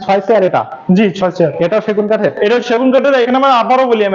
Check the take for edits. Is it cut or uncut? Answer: uncut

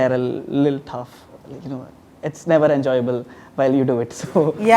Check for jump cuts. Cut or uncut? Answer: uncut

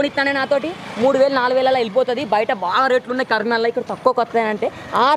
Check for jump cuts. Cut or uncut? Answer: uncut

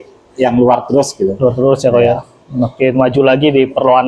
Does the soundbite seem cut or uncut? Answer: uncut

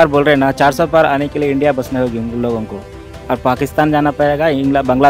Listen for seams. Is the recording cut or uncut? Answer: uncut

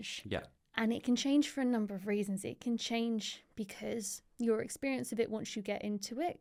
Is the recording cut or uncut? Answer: uncut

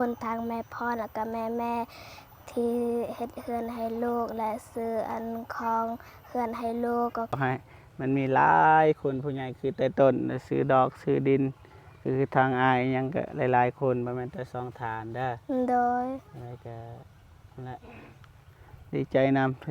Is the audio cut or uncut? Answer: cut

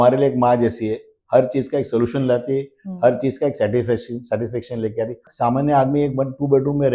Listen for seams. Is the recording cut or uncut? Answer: cut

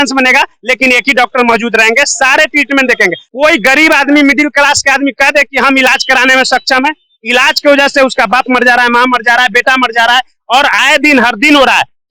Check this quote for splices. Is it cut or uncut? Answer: cut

